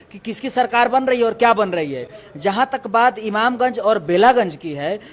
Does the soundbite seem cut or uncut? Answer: uncut